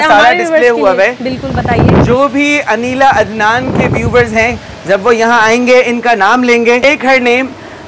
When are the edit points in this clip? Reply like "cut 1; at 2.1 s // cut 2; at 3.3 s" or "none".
cut 1; at 6.8 s